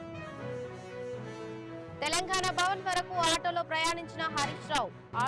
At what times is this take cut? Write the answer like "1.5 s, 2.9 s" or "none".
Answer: 1.1 s